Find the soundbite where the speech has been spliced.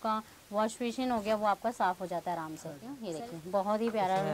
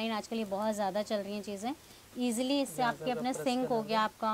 first; 1 cut; at 3.0 s

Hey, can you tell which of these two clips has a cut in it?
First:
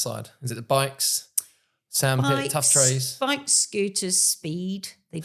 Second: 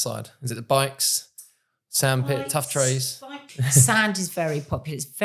second; 1 cut; at 3.2 s

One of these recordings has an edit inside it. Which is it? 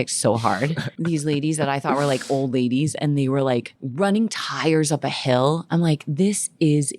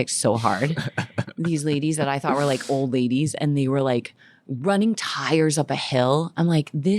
first; 2 cuts; at 0.9 s, 3.8 s

